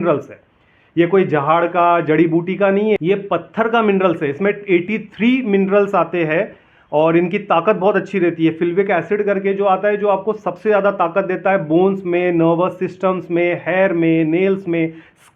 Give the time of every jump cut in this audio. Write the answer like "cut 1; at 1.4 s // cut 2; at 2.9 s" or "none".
cut 1; at 3.0 s